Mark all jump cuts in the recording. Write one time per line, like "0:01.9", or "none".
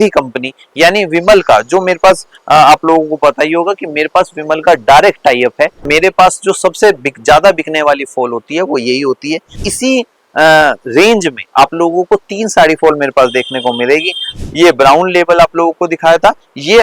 0:05.8
0:09.6
0:14.3